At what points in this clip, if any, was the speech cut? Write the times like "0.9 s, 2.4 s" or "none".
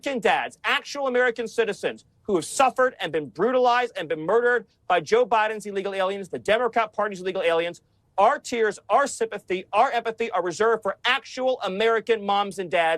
none